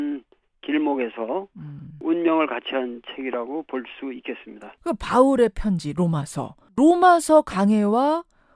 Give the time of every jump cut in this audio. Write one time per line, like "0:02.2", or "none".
none